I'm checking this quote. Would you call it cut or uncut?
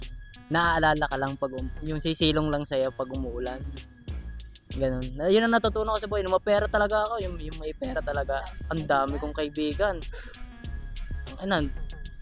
uncut